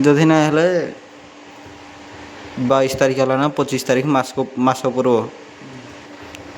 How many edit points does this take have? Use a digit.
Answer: 0